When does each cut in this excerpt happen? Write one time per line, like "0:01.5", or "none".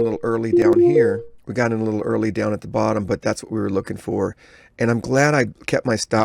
0:01.4